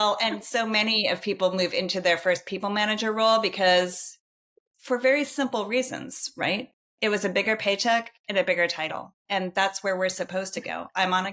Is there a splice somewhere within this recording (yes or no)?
no